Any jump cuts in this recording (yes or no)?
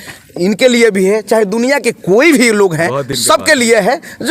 no